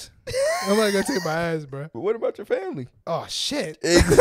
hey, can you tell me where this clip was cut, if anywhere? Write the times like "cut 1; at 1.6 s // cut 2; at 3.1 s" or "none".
cut 1; at 2.0 s // cut 2; at 2.9 s